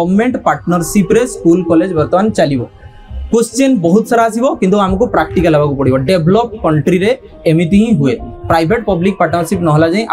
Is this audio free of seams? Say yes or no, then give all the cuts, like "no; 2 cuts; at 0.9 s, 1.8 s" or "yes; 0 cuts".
yes; 0 cuts